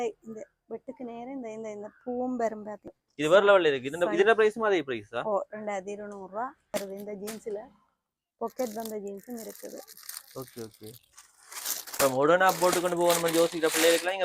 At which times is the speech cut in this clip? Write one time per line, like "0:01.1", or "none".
0:03.0
0:06.6